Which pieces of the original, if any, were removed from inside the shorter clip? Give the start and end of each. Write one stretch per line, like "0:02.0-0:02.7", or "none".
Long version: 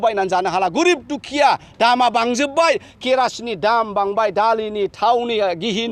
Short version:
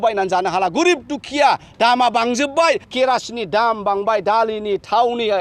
0:02.9-0:03.0

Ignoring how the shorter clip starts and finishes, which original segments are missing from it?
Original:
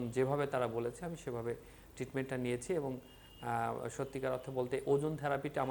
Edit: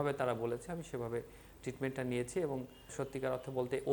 0:03.2-0:03.9

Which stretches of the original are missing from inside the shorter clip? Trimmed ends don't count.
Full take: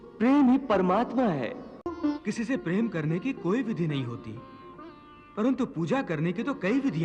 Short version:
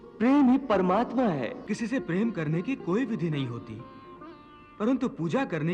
0:01.7-0:02.2

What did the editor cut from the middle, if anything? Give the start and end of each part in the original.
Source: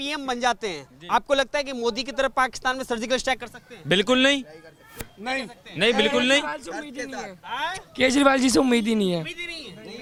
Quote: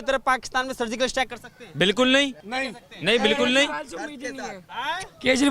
0:04.5-0:05.2

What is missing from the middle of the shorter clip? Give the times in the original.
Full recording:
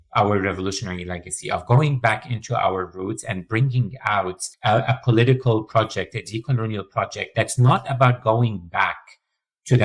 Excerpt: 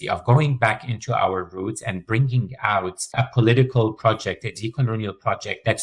0:04.6-0:04.8

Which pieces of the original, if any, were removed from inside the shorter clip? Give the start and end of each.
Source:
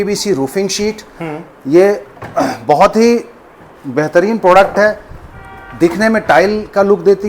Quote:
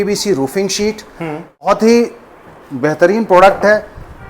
0:01.7-0:02.8

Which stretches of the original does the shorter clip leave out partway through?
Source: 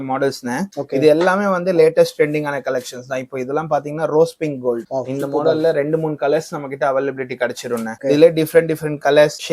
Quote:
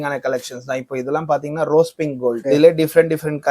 0:04.8-0:08.0

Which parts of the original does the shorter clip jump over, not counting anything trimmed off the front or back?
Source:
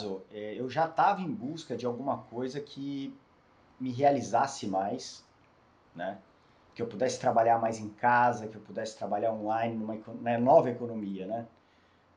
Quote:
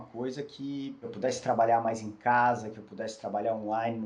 0:03.2-0:06.8

